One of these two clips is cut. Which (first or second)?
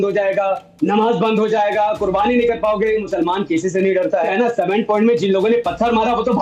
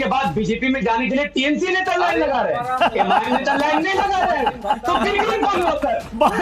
first